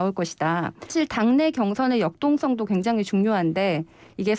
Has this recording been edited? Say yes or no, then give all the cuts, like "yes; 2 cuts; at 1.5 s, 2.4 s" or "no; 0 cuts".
yes; 1 cut; at 0.9 s